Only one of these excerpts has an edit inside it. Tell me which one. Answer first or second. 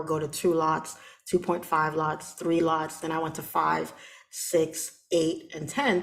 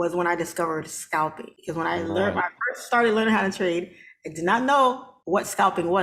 second